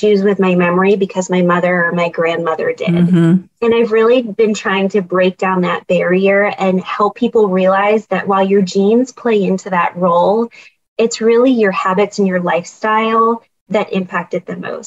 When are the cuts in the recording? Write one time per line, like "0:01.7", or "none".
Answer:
none